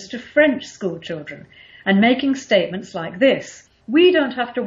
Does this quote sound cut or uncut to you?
cut